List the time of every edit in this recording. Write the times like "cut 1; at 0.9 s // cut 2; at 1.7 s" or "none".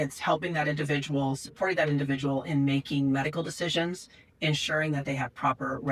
none